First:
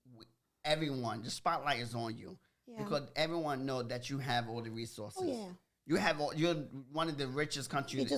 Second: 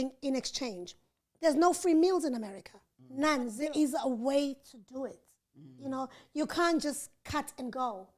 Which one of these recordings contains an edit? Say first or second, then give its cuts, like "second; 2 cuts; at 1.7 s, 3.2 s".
second; 1 cut; at 3.6 s